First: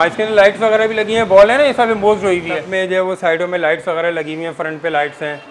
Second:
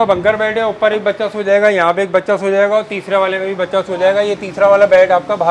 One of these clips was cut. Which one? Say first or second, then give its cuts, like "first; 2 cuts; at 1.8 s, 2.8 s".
first; 1 cut; at 2.7 s